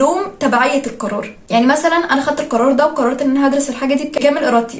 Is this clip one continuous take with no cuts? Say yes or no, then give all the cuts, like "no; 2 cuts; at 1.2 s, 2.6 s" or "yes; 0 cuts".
yes; 0 cuts